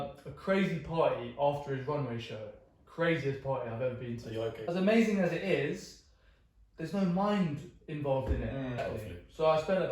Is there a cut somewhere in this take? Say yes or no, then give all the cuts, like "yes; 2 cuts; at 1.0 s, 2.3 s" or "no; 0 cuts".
yes; 2 cuts; at 4.6 s, 8.8 s